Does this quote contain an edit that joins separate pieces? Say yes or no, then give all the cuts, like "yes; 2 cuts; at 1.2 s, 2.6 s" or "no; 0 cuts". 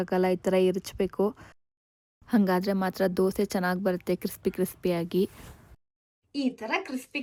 no; 0 cuts